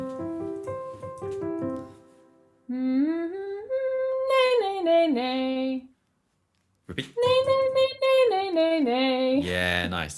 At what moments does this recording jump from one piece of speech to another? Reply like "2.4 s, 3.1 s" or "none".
none

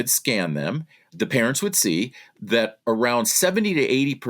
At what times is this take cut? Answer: 1.1 s

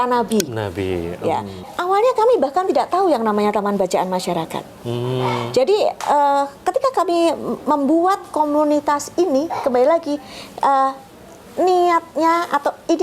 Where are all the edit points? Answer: 1.6 s

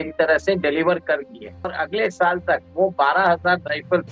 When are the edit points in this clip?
1.8 s

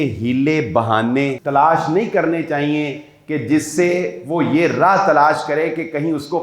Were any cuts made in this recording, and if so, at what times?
1.4 s

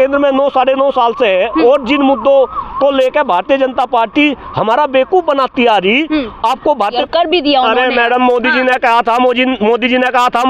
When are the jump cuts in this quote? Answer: 7.0 s

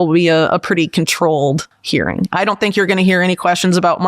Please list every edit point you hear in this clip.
1.7 s

